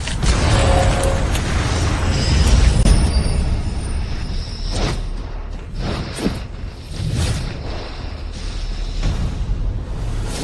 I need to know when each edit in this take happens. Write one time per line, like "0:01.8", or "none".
0:02.8